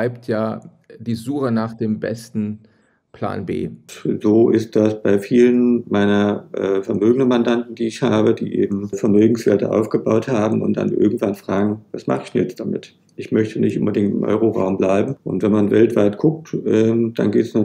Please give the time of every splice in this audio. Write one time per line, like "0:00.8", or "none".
0:03.9
0:15.2